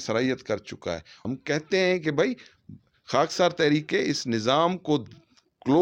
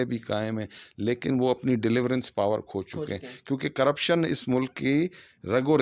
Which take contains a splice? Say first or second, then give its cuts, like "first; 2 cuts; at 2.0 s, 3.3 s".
first; 1 cut; at 1.1 s